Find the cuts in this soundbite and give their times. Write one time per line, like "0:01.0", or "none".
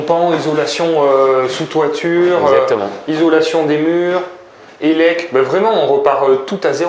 none